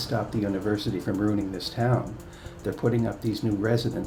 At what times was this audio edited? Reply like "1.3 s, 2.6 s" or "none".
none